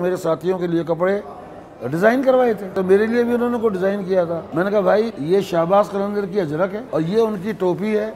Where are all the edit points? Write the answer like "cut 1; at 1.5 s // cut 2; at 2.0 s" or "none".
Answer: cut 1; at 2.7 s // cut 2; at 4.4 s // cut 3; at 5.2 s // cut 4; at 6.8 s